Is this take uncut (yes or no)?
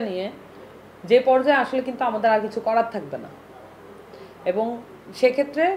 yes